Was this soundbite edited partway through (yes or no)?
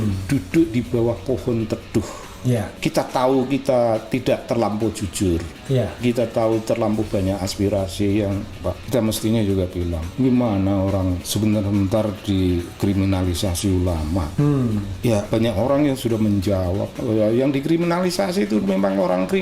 yes